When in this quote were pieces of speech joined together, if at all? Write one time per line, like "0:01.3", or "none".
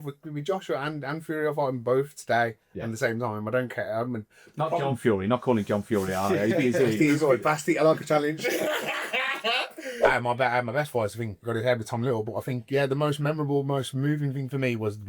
0:10.1